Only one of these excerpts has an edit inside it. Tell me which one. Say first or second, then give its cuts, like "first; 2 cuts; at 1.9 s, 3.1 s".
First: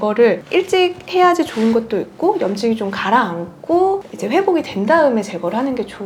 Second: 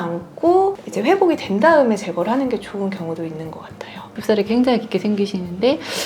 second; 1 cut; at 4.1 s